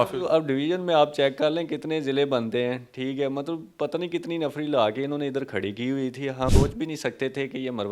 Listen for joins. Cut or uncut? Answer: cut